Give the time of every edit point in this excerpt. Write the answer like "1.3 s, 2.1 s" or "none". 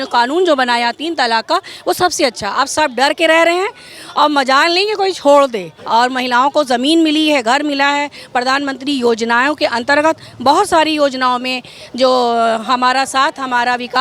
5.7 s